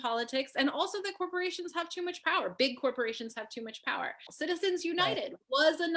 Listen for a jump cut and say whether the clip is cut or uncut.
cut